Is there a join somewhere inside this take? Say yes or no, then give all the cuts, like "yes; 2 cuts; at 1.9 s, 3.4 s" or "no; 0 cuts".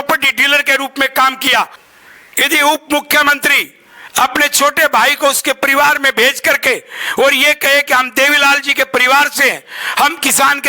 yes; 1 cut; at 1.8 s